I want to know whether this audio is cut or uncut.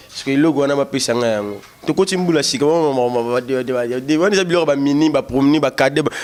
uncut